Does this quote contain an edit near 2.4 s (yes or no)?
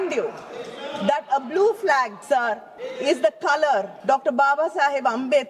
yes